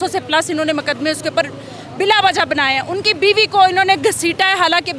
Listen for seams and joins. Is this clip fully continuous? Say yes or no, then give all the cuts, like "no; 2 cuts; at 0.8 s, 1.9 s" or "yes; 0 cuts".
yes; 0 cuts